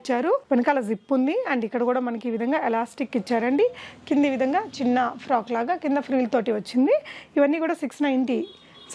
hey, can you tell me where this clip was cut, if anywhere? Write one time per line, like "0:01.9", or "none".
none